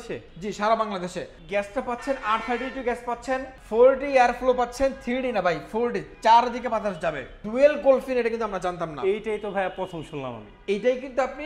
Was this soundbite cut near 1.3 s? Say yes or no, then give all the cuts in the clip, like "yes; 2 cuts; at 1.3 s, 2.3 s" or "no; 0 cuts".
yes; 3 cuts; at 1.3 s, 3.5 s, 7.4 s